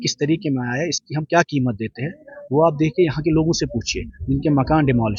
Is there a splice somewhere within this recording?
no; 0 cuts

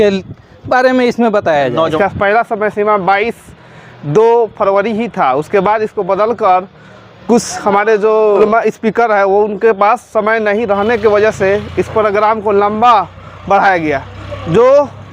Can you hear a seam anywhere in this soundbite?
yes; 2 cuts; at 1.9 s, 8.4 s

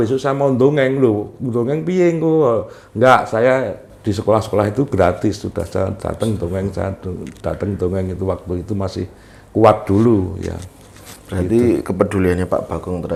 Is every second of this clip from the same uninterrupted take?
yes; 0 cuts

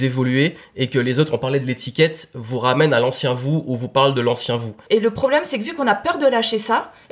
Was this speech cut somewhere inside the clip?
yes; 1 cut; at 4.7 s

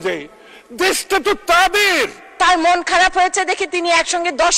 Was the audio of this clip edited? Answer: yes; 1 cut; at 2.3 s

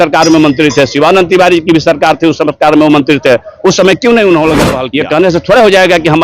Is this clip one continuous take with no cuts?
no; 1 cut; at 4.8 s

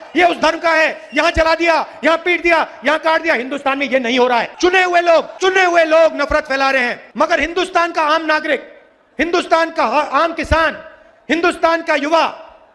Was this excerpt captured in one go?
yes; 0 cuts

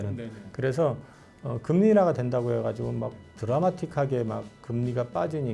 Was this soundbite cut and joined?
no; 0 cuts

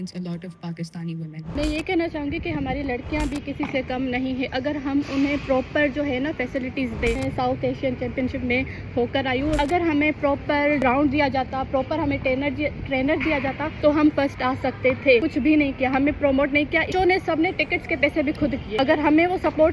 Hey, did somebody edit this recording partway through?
yes; 8 cuts; at 1.4 s, 7.2 s, 9.6 s, 10.8 s, 13.7 s, 15.3 s, 16.9 s, 18.7 s

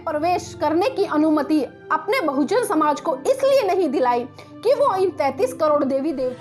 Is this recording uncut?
yes; 0 cuts

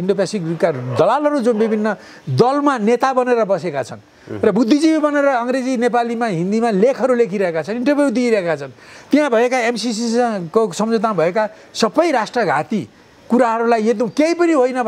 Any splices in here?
no; 0 cuts

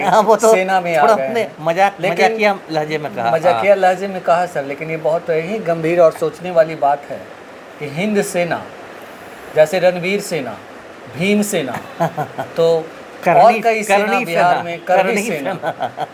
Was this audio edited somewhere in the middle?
no; 0 cuts

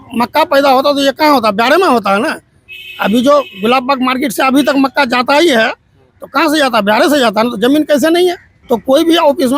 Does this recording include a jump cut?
yes; 1 cut; at 8.5 s

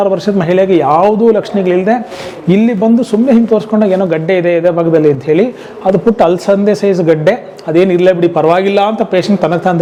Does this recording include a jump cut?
no; 0 cuts

